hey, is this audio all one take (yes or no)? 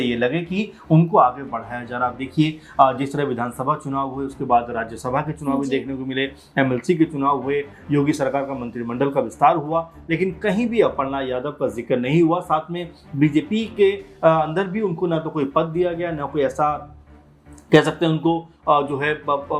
yes